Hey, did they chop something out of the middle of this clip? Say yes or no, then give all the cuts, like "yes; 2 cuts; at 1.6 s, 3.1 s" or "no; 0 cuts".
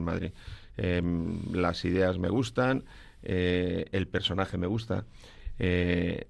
no; 0 cuts